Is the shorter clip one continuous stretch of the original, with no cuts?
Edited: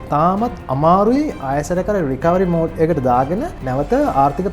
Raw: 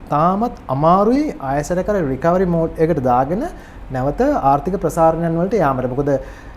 no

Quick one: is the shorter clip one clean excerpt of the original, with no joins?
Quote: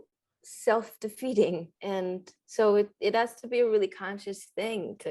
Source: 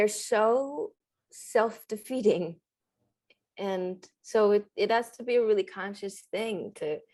no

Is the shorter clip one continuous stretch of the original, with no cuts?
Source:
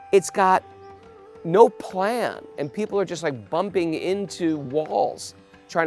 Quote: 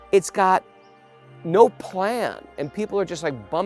yes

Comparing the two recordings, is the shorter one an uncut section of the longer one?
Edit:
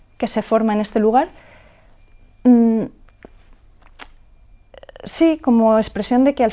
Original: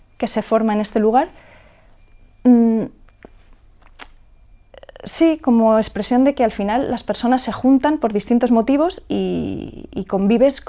yes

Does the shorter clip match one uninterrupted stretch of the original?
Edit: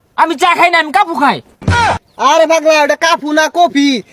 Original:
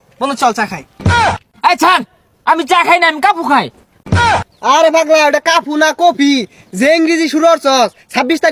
no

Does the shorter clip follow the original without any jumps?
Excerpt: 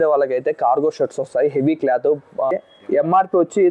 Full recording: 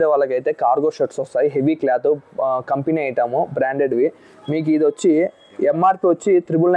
no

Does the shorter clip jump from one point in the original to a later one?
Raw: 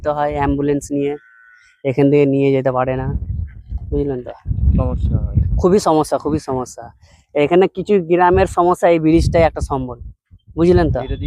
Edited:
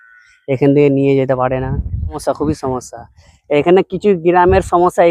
yes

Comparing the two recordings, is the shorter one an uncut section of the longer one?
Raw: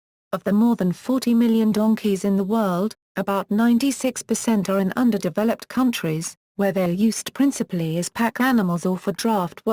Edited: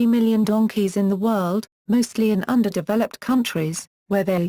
no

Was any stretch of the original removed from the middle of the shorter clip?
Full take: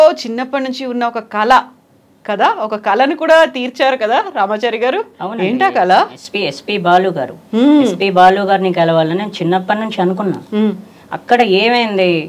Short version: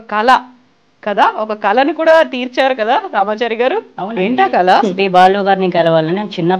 yes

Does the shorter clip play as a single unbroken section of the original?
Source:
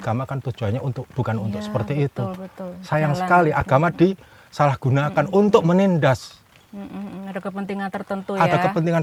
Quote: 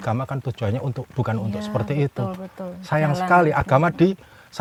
yes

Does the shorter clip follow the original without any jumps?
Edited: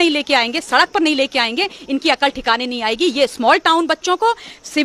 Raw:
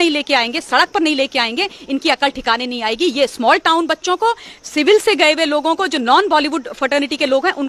yes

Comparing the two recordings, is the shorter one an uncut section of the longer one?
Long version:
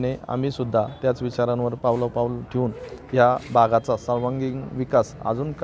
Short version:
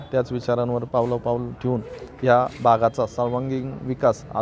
yes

